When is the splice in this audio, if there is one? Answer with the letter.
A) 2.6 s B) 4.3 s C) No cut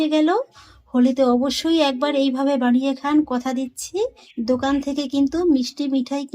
B